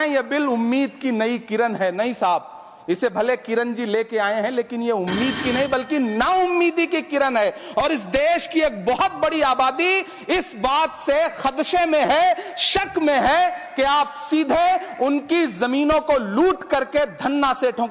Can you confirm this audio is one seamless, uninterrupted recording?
yes; 0 cuts

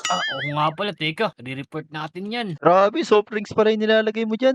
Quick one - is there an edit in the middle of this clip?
no; 0 cuts

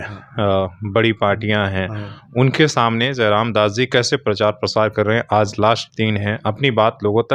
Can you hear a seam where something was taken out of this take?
no; 0 cuts

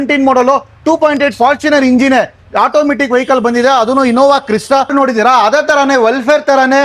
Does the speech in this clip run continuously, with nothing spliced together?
no; 1 cut; at 4.9 s

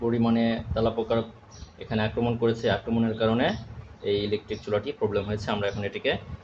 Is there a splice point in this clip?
no; 0 cuts

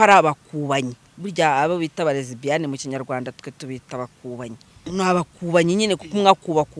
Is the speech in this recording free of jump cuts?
no; 1 cut; at 4.9 s

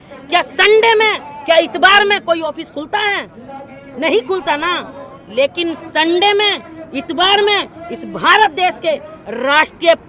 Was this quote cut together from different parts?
no; 0 cuts

